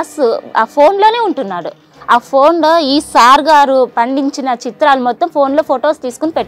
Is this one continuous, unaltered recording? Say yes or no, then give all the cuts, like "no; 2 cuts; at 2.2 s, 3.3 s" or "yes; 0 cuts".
no; 1 cut; at 1.9 s